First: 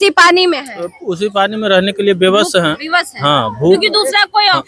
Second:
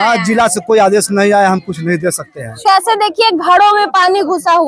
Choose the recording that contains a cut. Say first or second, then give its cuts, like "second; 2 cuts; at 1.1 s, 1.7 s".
second; 1 cut; at 2.6 s